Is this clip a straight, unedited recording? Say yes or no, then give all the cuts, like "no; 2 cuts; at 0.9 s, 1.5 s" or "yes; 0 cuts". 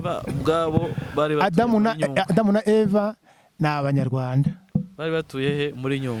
yes; 0 cuts